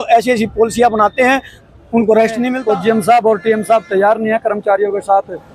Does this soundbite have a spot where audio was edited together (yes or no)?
yes